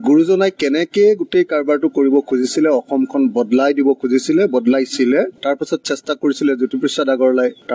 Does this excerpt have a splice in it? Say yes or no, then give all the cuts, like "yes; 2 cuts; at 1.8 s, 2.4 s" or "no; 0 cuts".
yes; 1 cut; at 5.4 s